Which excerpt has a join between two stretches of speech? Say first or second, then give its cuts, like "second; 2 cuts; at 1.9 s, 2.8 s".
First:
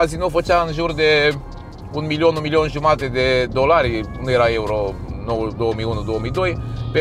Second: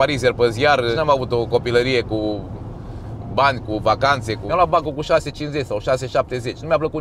second; 2 cuts; at 0.9 s, 4.4 s